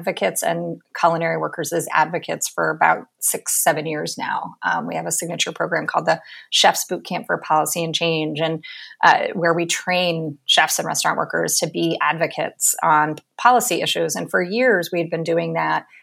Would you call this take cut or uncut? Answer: uncut